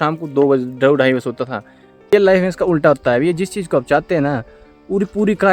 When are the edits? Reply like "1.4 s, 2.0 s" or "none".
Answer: 2.1 s